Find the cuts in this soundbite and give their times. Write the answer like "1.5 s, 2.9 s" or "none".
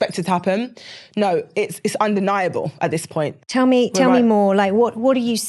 none